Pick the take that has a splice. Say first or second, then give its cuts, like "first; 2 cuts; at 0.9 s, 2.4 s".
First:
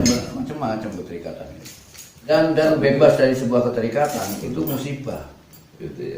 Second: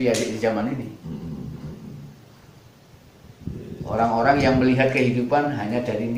first; 1 cut; at 2.3 s